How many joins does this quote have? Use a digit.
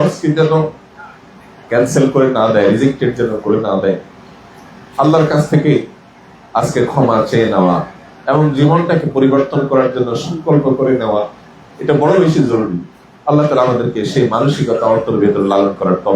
0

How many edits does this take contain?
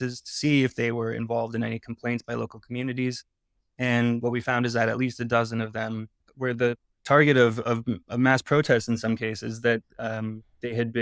1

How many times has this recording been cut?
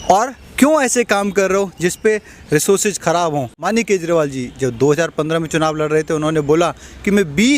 1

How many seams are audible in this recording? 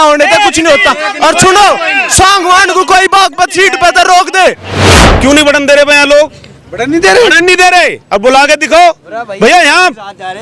1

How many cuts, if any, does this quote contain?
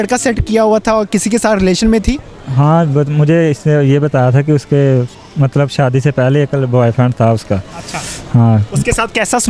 0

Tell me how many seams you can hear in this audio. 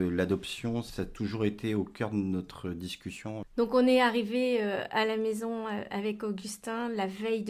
1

